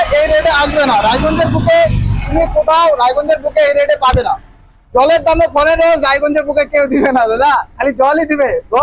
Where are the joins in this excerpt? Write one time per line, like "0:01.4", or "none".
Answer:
none